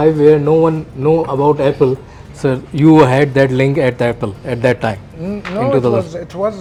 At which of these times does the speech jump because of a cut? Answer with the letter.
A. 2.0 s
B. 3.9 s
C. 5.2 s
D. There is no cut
D